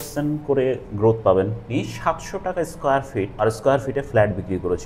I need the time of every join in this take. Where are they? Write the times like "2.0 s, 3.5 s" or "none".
1.7 s, 3.4 s